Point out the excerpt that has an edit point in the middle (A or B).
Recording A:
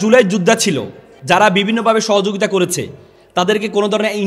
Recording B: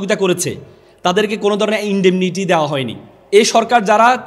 B